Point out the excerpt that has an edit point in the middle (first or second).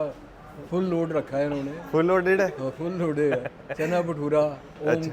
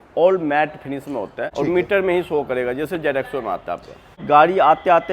second